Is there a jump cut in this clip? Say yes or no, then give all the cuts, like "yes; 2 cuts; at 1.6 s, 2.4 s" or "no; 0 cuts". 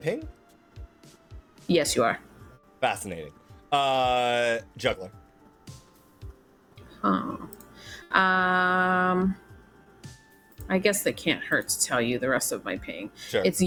no; 0 cuts